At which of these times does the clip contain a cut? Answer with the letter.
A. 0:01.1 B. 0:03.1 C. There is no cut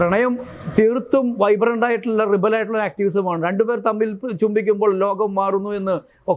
C